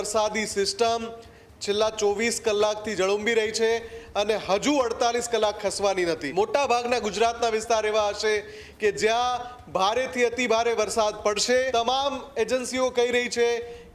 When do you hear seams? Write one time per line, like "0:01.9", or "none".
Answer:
0:06.2
0:11.7